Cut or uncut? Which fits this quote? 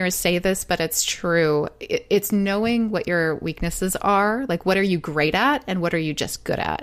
uncut